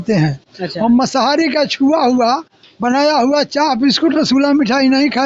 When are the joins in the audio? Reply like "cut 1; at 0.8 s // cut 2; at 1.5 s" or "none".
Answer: none